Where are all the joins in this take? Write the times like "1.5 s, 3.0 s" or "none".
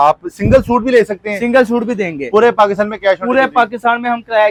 none